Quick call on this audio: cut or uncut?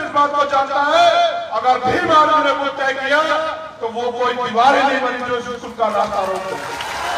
uncut